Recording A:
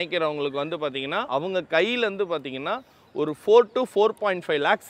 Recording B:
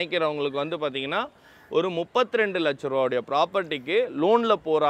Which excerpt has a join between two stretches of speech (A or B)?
A